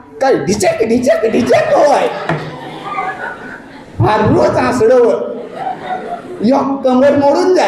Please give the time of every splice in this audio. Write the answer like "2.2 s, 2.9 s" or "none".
none